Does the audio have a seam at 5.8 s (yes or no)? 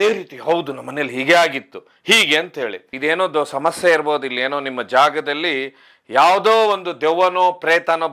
no